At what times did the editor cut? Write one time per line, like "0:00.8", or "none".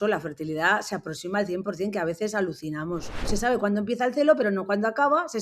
0:03.3